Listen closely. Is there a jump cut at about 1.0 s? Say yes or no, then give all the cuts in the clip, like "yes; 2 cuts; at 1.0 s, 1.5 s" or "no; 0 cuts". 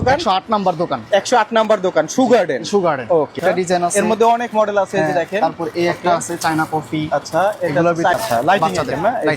no; 2 cuts; at 3.4 s, 8.2 s